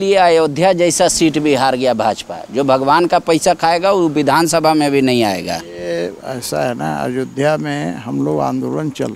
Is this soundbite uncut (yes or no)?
yes